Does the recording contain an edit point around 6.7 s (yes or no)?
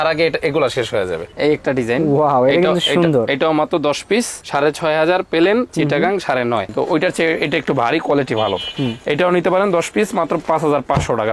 yes